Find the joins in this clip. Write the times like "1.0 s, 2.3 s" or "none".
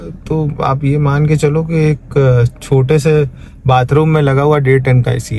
none